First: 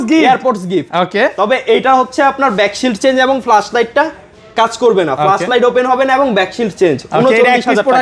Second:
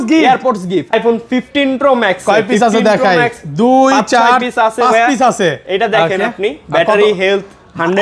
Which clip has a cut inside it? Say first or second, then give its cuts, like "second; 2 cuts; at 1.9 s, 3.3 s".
second; 1 cut; at 0.9 s